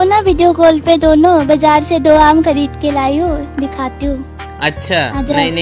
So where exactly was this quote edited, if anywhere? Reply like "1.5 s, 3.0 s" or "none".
none